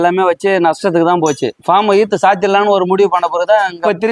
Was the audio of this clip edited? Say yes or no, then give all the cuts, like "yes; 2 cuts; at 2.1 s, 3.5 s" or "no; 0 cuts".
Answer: no; 0 cuts